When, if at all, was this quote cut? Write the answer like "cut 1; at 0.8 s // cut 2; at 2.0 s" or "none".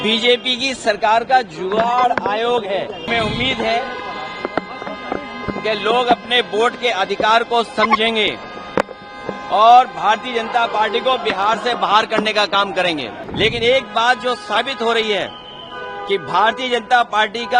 cut 1; at 3.1 s // cut 2; at 13.2 s